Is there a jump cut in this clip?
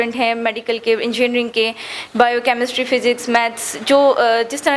no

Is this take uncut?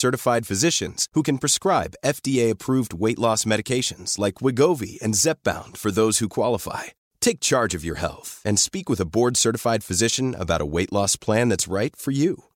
yes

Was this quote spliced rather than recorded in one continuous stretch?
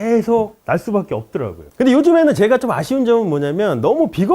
yes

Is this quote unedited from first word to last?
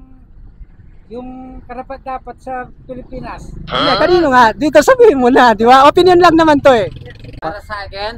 no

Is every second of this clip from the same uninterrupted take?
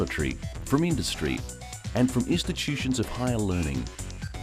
yes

